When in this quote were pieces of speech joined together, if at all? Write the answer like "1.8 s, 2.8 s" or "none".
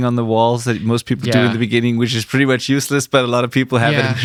none